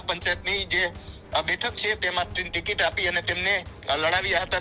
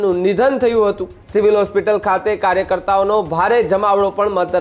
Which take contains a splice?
second; 1 cut; at 1.1 s

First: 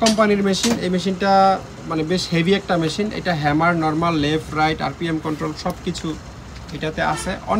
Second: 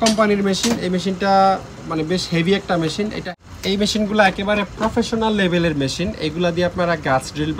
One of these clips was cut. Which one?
second; 1 cut; at 3.2 s

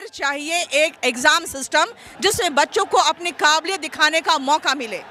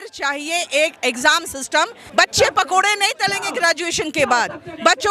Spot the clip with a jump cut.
second; 1 cut; at 2.0 s

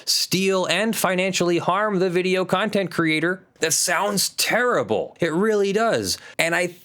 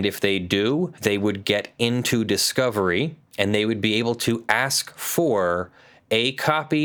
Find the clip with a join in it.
first; 1 cut; at 3.5 s

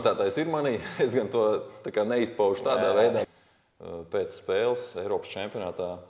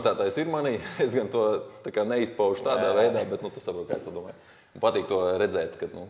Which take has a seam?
first; 1 cut; at 3.3 s

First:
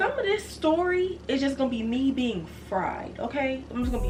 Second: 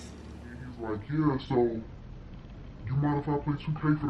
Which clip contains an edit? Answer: second; 1 cut; at 1.0 s

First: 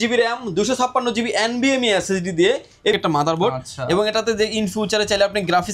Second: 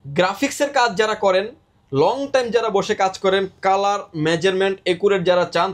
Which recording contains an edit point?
first; 1 cut; at 3.0 s

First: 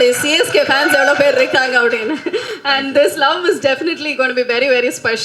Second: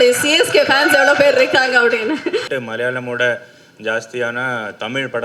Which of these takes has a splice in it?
second; 1 cut; at 2.5 s

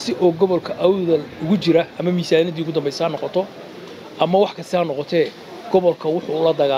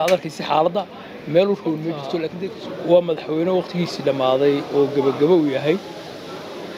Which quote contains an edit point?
second; 1 cut; at 2.4 s

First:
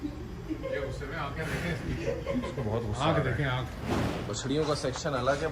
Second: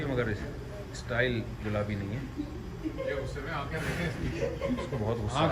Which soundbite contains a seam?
first; 1 cut; at 4.1 s

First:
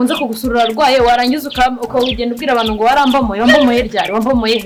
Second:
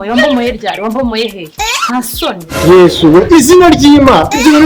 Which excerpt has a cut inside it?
second; 1 cut; at 2.5 s

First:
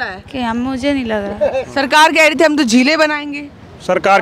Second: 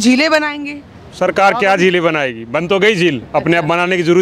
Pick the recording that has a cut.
first; 1 cut; at 1.7 s

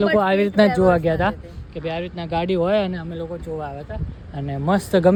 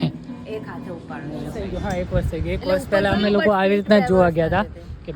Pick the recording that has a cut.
second; 1 cut; at 1.6 s

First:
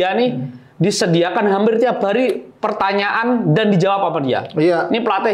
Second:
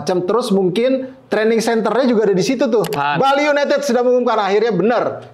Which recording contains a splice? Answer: second; 1 cut; at 2.9 s

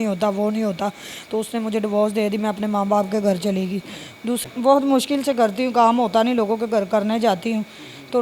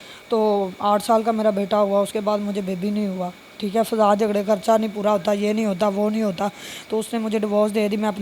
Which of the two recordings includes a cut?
first; 1 cut; at 4.4 s

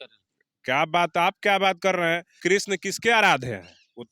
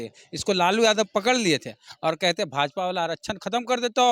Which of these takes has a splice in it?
first; 1 cut; at 2.4 s

